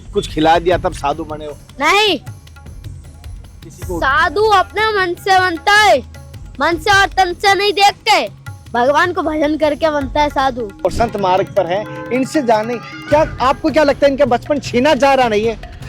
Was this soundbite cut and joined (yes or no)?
yes